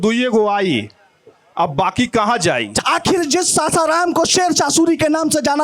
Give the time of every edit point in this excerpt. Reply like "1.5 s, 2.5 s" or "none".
2.7 s